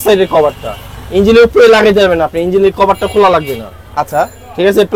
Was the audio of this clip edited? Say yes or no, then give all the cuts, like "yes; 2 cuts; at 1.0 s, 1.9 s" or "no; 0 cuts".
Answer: no; 0 cuts